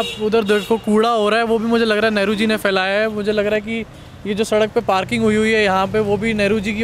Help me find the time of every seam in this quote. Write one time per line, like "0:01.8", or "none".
none